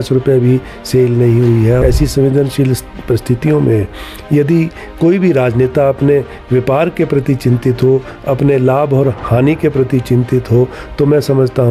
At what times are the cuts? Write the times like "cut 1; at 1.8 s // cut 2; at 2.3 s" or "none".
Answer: cut 1; at 1.8 s